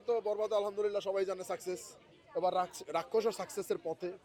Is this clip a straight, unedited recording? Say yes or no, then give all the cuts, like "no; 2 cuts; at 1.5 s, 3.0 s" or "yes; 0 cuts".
yes; 0 cuts